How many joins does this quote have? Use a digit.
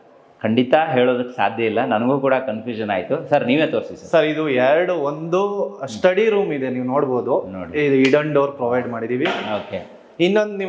0